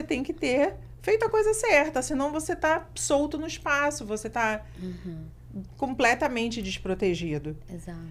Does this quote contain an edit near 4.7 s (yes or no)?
no